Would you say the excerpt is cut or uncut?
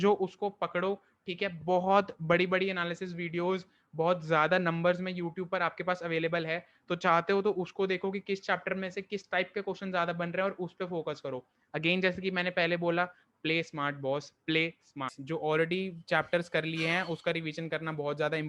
cut